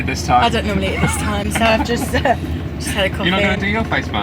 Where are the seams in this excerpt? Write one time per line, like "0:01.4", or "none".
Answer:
none